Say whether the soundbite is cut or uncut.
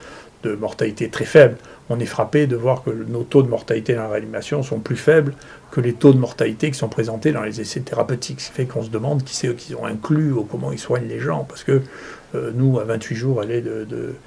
uncut